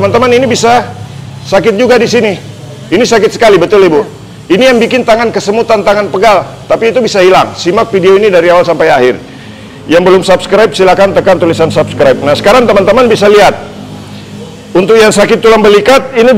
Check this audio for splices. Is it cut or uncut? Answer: uncut